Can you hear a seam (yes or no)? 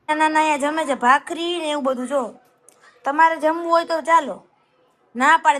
no